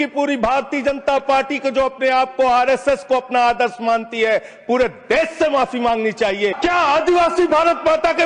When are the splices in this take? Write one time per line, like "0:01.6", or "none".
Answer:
0:06.6